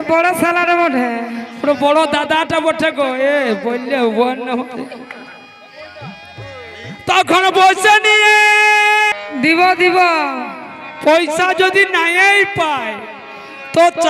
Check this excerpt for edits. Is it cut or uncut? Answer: cut